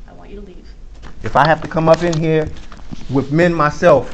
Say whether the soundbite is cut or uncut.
cut